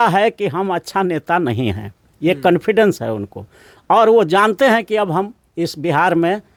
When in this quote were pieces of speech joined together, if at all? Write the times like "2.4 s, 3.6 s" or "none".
none